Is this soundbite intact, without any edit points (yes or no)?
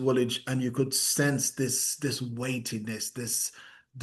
yes